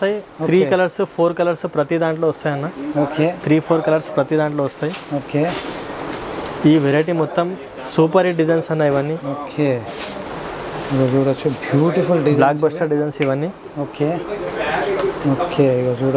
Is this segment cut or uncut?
uncut